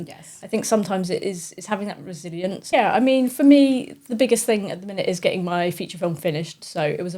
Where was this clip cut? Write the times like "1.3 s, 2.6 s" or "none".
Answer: 2.6 s